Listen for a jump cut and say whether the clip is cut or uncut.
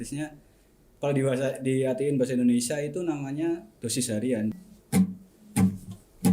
cut